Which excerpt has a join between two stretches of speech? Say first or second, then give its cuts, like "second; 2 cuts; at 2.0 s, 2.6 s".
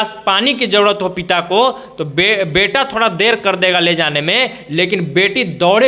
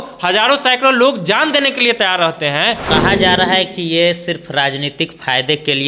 second; 1 cut; at 2.8 s